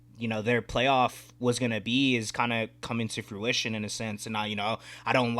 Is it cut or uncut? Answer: uncut